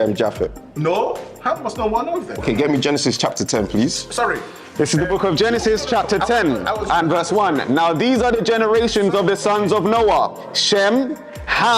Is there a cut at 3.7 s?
no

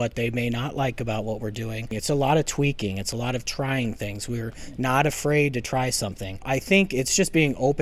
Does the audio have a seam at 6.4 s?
yes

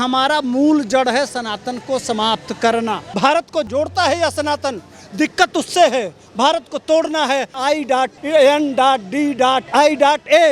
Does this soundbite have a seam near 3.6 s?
yes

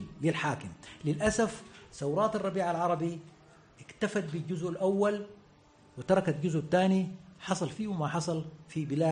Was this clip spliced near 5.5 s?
no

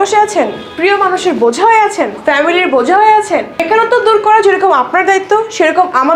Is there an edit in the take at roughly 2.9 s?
no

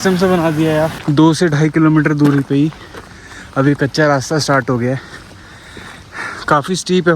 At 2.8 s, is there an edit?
no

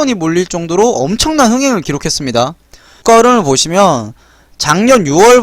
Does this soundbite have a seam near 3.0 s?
yes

